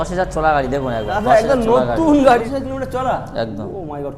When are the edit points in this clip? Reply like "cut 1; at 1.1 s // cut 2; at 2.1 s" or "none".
cut 1; at 2.4 s